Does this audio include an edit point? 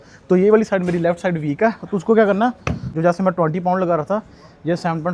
yes; 1 cut; at 2.8 s

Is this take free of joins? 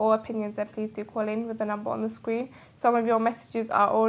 no; 1 cut; at 2.5 s

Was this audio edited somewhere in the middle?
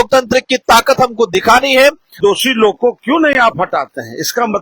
yes; 1 cut; at 2.2 s

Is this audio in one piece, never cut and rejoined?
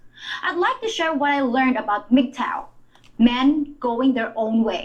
yes; 0 cuts

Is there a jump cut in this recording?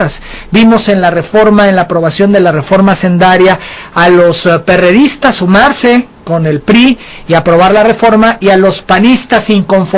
no; 0 cuts

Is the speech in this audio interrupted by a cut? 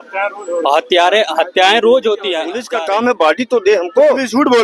yes; 1 cut; at 2.6 s

